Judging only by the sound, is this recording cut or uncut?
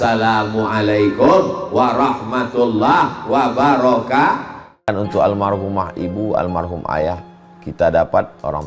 cut